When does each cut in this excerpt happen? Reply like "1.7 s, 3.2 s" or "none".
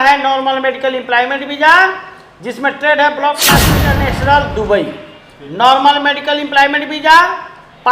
3.7 s